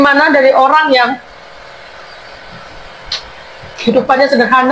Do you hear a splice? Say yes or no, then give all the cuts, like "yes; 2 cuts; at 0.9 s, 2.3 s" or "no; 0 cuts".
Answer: no; 0 cuts